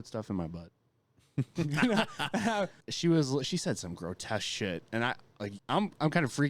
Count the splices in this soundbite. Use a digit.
2